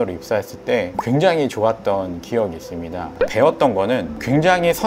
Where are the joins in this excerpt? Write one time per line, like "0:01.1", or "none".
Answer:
0:03.1